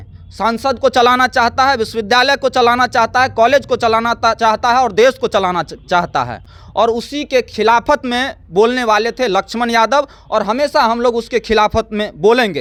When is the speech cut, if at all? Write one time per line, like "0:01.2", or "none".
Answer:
none

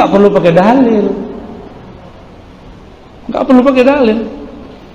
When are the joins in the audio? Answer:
none

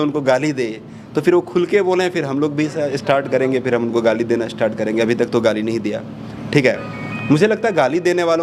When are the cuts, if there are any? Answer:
none

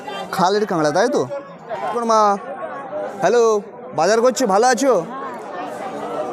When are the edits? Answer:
0:01.9

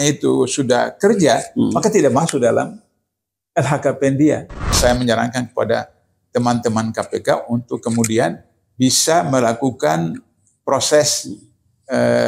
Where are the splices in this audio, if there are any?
0:04.8

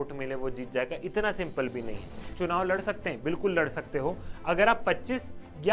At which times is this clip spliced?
0:02.2

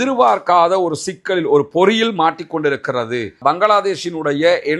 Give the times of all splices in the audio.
0:03.3

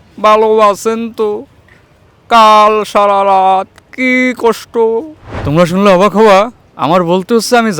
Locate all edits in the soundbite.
0:05.2

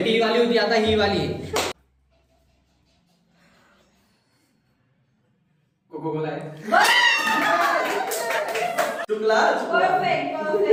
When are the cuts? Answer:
none

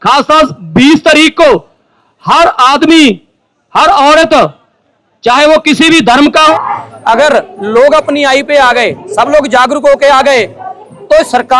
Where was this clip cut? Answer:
0:06.5

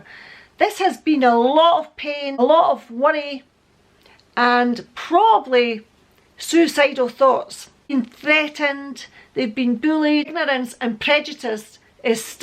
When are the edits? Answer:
0:07.9

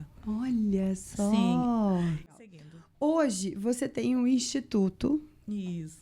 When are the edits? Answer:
0:02.3

